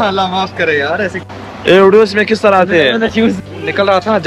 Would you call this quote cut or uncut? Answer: cut